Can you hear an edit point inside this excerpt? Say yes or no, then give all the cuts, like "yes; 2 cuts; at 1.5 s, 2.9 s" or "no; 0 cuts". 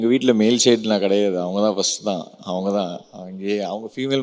no; 0 cuts